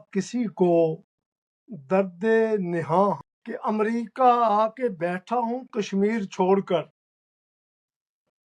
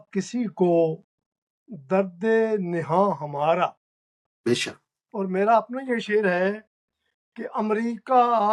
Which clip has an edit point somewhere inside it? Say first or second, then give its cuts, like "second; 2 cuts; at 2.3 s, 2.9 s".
first; 1 cut; at 3.3 s